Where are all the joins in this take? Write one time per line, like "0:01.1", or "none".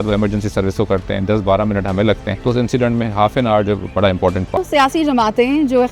0:02.3
0:04.6